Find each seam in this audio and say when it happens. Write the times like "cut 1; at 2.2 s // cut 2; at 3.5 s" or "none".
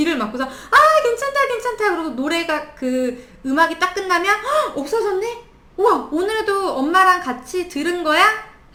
none

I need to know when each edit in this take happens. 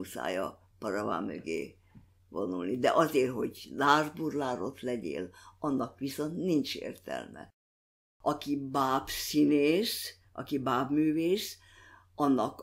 cut 1; at 8.0 s

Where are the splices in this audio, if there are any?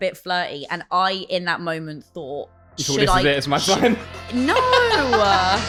none

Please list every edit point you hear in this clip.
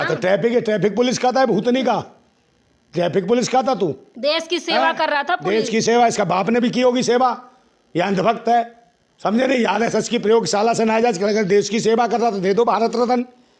none

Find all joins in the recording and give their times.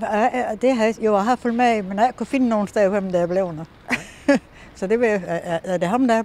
none

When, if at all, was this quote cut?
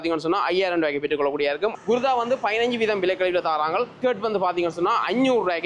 cut 1; at 1.7 s // cut 2; at 4.0 s

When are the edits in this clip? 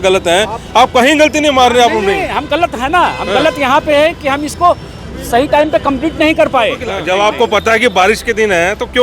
cut 1; at 6.9 s

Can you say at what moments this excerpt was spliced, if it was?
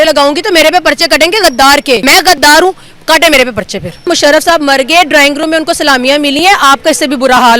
cut 1; at 2.0 s // cut 2; at 4.1 s

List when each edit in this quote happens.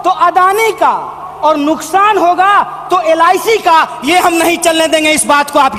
none

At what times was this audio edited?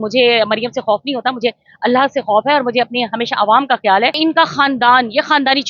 cut 1; at 4.2 s

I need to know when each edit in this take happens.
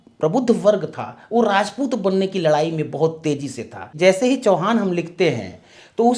cut 1; at 3.8 s

